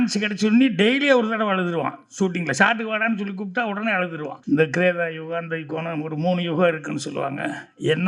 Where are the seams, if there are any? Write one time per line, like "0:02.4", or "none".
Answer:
0:04.4